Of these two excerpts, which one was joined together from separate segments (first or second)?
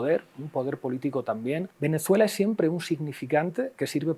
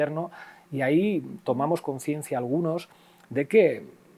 first